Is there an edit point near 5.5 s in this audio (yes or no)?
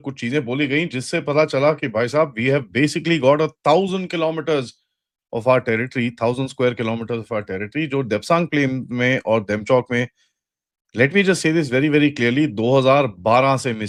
no